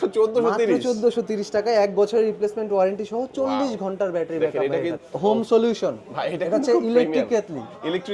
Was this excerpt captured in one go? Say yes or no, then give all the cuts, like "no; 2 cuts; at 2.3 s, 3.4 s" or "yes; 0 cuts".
no; 1 cut; at 5.0 s